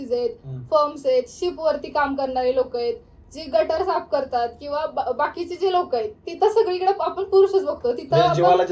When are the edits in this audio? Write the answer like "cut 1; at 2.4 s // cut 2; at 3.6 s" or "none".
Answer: none